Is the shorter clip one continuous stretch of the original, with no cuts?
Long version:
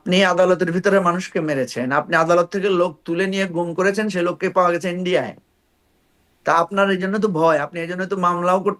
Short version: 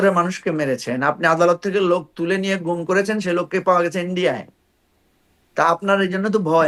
yes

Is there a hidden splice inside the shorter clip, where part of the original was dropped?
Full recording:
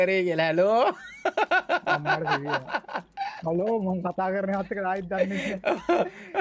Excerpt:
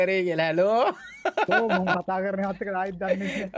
yes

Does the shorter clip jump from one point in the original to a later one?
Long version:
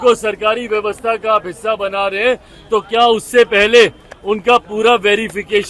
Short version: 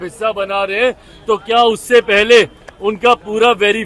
no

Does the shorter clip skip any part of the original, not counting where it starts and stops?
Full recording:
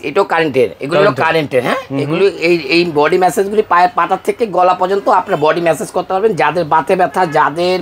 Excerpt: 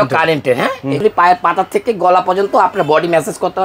yes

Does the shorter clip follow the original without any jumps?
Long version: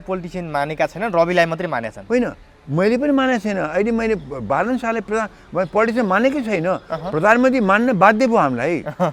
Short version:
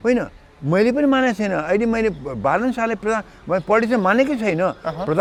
yes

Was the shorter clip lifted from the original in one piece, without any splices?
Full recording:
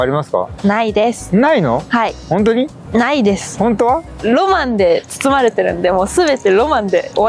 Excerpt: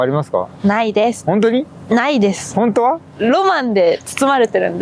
no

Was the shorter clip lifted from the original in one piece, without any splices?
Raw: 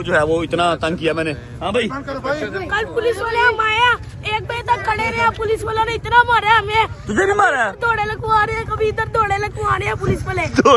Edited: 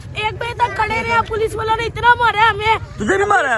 yes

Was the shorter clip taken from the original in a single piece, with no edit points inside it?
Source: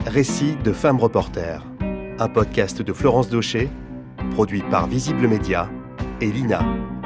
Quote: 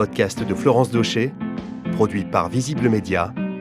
yes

